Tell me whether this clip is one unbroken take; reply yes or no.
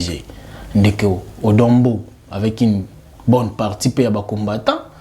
yes